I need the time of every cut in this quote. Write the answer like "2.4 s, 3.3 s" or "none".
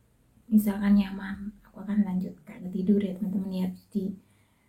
2.7 s